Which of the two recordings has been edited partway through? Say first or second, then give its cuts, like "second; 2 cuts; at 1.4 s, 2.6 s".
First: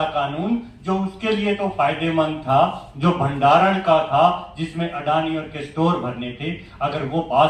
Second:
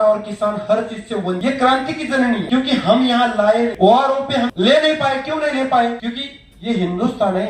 second; 5 cuts; at 1.4 s, 2.5 s, 3.7 s, 4.5 s, 6.0 s